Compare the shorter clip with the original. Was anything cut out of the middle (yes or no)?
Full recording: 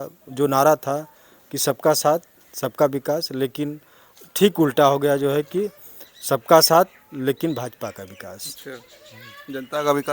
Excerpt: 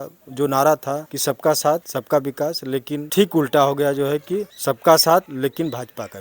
yes